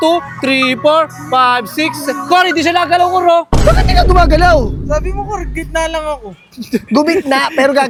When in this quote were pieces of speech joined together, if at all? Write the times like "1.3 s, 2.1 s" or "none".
none